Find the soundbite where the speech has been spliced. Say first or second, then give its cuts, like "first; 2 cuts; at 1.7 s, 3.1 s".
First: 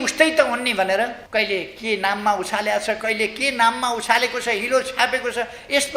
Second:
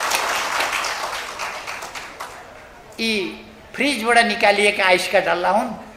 first; 1 cut; at 1.2 s